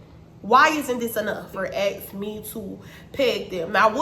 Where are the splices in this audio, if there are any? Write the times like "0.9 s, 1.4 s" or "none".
1.5 s